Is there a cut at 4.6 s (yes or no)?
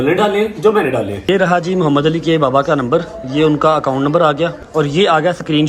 yes